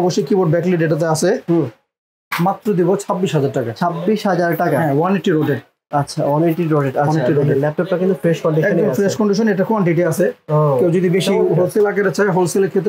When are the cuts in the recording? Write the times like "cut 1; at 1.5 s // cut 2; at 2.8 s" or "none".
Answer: none